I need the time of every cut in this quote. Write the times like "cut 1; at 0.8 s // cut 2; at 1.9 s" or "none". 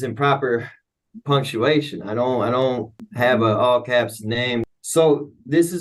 cut 1; at 3.1 s // cut 2; at 4.6 s

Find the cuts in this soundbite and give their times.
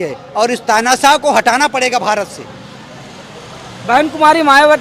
none

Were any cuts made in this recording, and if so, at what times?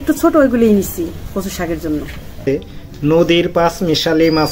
cut 1; at 2.5 s

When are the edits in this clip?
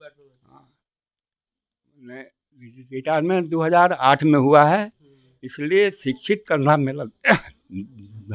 none

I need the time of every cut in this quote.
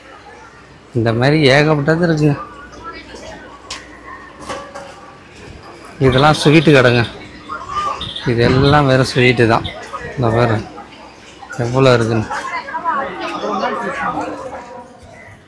cut 1; at 14.4 s

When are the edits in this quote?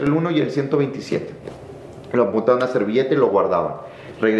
none

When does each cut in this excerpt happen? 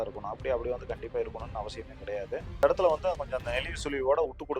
cut 1; at 2.6 s

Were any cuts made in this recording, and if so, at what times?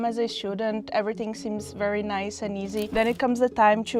cut 1; at 2.9 s

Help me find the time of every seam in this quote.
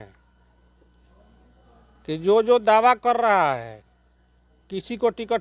none

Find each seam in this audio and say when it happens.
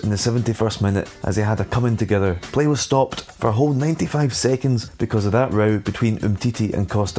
cut 1; at 1.1 s // cut 2; at 2.4 s // cut 3; at 3.2 s // cut 4; at 4.9 s

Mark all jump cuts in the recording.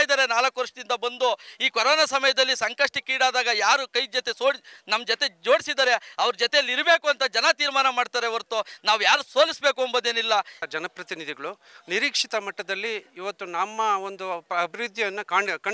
cut 1; at 10.6 s

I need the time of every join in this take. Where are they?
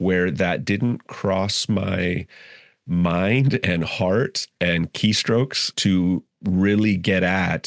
cut 1; at 5.7 s

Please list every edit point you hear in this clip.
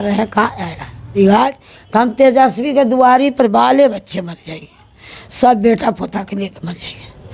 cut 1; at 1.1 s

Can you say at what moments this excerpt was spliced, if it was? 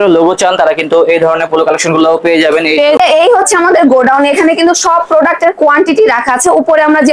cut 1; at 2.7 s

